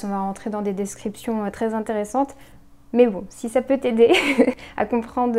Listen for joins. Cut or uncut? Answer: uncut